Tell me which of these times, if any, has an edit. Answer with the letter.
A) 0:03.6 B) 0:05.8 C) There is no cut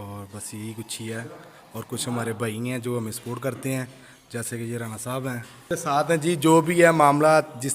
B